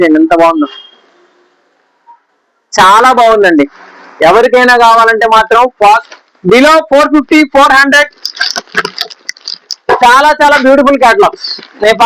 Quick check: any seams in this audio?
yes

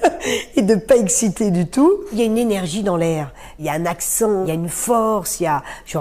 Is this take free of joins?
no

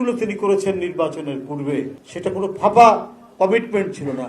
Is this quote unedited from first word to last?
no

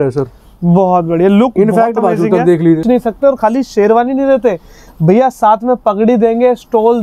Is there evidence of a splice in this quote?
yes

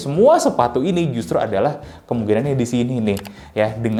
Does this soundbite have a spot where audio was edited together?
no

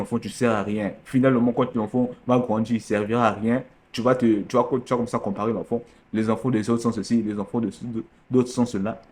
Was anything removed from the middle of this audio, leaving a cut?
no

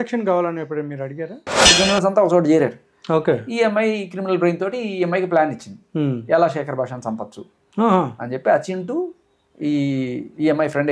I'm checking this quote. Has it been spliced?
yes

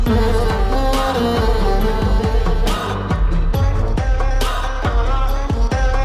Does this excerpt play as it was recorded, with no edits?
yes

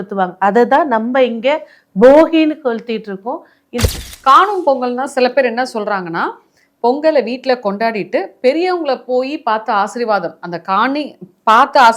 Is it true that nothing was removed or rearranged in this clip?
no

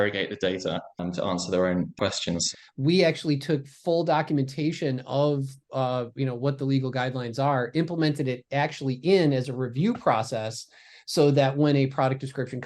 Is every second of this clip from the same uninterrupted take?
no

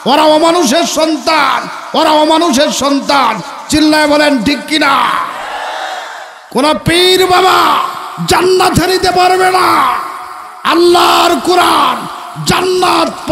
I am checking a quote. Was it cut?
no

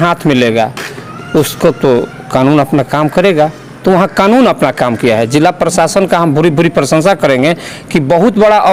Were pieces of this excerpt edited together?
no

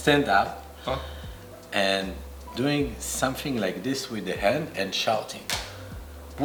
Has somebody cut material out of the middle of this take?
no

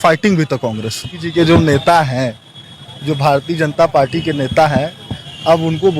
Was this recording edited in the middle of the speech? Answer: yes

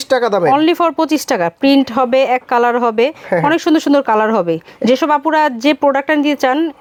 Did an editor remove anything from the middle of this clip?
no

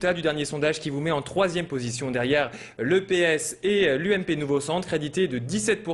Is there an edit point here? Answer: no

